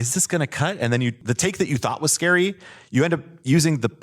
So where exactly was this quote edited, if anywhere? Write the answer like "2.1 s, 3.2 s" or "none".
1.2 s